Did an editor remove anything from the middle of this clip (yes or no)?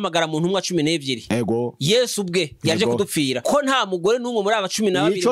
yes